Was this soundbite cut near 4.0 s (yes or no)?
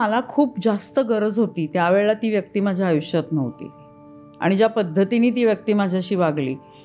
no